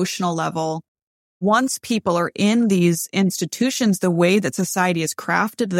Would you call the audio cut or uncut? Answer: cut